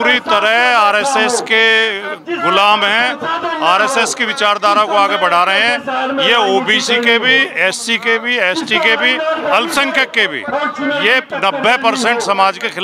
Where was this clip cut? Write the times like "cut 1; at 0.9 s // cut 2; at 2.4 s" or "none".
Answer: none